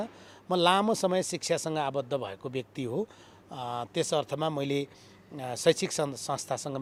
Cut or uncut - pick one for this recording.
uncut